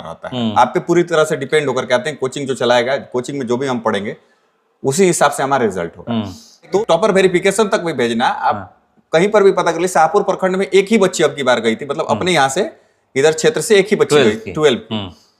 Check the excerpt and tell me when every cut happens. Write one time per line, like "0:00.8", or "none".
0:06.8